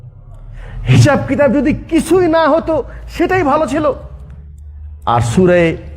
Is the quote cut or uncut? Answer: uncut